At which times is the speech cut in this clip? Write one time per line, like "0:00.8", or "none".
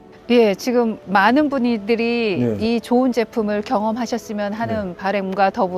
0:02.6